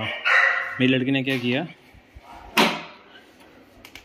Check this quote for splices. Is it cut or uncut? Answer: uncut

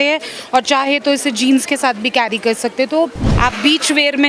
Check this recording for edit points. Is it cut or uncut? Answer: cut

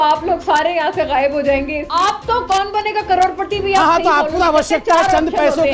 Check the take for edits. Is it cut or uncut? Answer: cut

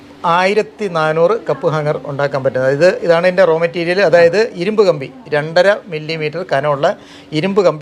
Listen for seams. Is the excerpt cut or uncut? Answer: uncut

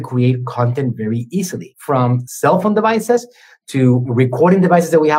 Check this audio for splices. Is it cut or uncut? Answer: cut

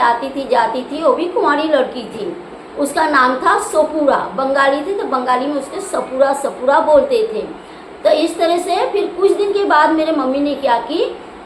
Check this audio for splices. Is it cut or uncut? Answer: uncut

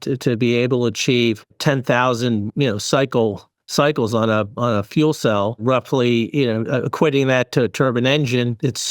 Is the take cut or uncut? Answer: cut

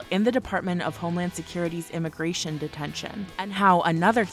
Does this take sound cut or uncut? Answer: cut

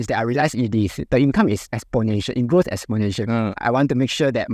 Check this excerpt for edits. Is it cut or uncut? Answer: cut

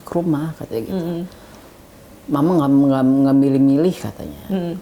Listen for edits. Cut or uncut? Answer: uncut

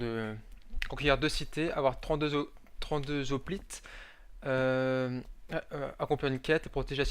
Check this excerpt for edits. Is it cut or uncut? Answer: cut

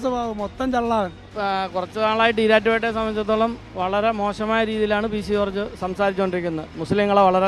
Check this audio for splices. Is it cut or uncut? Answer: cut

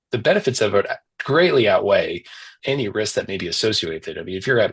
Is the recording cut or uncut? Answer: uncut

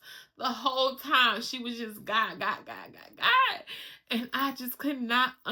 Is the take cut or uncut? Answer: uncut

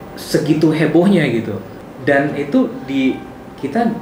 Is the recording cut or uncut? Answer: cut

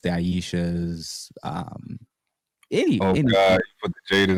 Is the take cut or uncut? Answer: uncut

